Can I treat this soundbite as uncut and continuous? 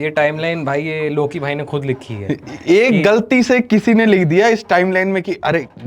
yes; 0 cuts

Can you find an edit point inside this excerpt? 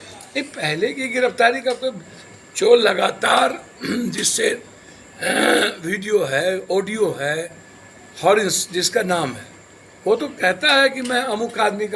no; 0 cuts

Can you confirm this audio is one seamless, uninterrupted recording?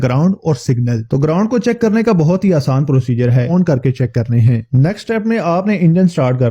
no; 1 cut; at 3.5 s

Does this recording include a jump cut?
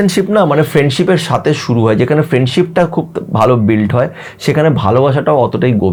no; 0 cuts

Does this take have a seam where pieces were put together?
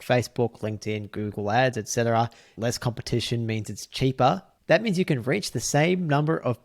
yes; 2 cuts; at 2.6 s, 4.5 s

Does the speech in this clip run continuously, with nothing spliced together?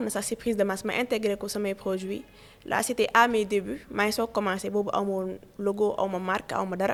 yes; 0 cuts

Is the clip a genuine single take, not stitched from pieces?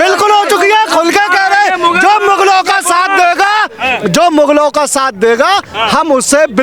yes; 0 cuts

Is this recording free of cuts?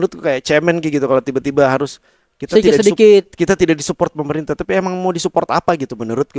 yes; 0 cuts

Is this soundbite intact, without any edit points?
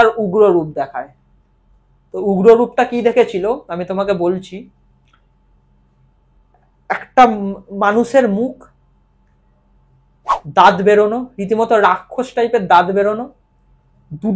yes; 0 cuts

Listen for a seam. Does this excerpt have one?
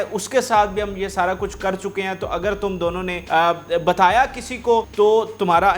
yes; 2 cuts; at 3.2 s, 4.9 s

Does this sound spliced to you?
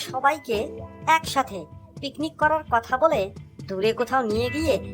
no; 0 cuts

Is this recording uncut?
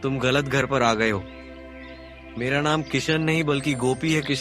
yes; 0 cuts

